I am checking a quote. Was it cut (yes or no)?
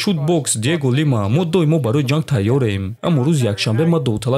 yes